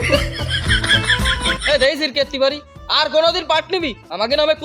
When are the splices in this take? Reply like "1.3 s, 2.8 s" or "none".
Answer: 1.4 s